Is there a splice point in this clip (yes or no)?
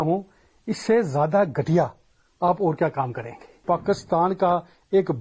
yes